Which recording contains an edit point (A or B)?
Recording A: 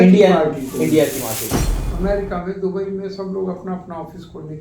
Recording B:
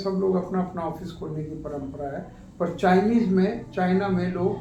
A